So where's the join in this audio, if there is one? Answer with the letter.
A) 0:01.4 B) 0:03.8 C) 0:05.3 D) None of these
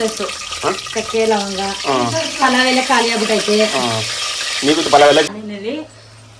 C